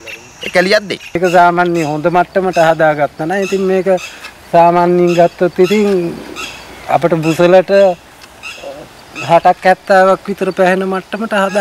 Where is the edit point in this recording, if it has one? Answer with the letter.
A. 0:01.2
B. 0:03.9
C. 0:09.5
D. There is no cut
A